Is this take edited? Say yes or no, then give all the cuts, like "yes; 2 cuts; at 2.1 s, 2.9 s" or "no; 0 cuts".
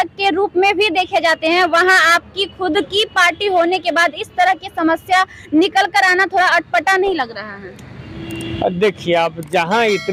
no; 0 cuts